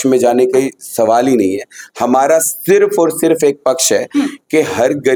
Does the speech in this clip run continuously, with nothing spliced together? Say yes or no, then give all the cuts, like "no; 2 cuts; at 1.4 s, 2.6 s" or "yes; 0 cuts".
yes; 0 cuts